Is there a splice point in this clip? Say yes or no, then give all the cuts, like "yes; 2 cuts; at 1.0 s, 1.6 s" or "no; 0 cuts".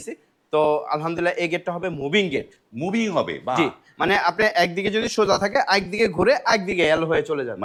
no; 0 cuts